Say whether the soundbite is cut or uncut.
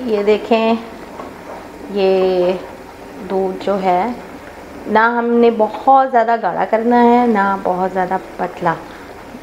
uncut